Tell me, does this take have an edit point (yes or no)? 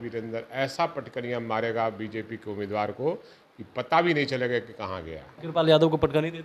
yes